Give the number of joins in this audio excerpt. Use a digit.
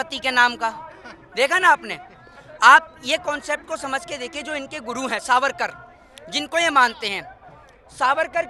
0